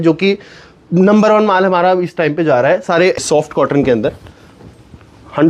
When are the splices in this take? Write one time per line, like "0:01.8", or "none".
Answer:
0:03.2